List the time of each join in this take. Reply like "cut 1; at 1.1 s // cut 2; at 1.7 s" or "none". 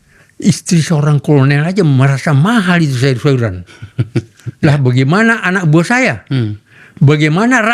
none

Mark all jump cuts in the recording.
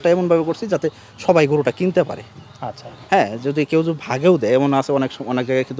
none

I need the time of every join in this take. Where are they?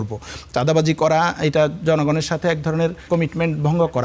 cut 1; at 3.0 s

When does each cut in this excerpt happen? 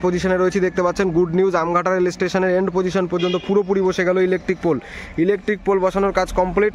none

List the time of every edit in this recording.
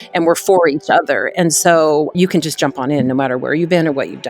cut 1; at 2.1 s

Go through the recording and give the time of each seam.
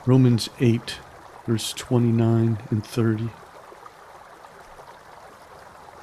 cut 1; at 3.3 s

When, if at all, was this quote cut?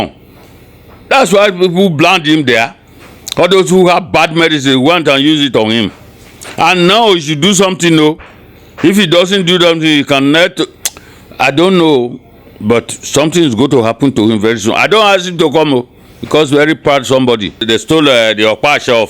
cut 1; at 17.6 s

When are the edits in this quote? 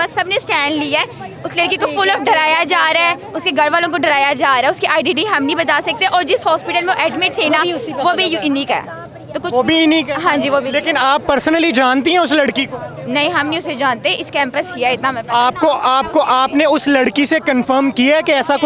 none

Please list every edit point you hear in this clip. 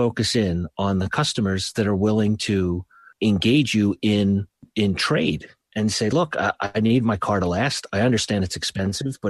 cut 1; at 3.0 s // cut 2; at 4.7 s

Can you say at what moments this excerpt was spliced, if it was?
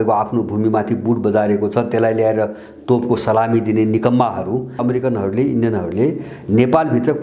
cut 1; at 4.8 s

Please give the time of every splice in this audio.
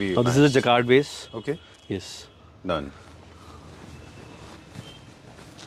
none

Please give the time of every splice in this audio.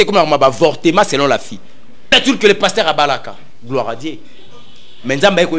cut 1; at 2.1 s

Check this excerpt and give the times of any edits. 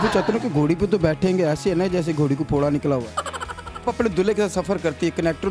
cut 1; at 3.8 s

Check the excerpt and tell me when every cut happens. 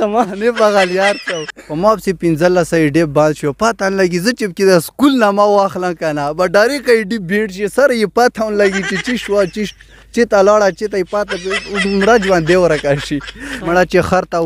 cut 1; at 1.4 s // cut 2; at 13.6 s

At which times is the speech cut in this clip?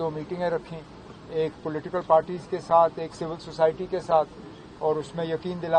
none

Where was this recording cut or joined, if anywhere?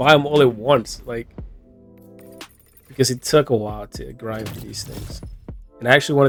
none

